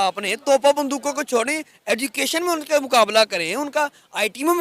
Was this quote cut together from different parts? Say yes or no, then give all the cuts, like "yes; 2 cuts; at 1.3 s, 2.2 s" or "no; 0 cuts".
no; 0 cuts